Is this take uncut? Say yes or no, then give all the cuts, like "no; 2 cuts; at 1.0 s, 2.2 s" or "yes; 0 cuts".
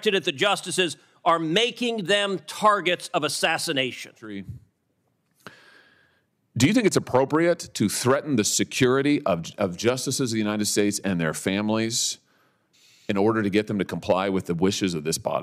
no; 1 cut; at 4.2 s